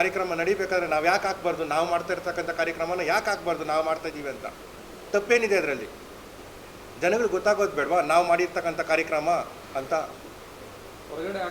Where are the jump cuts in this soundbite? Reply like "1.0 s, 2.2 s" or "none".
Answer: none